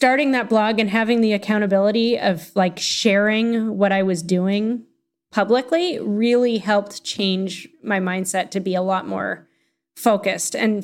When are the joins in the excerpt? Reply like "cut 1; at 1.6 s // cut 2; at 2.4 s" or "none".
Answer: none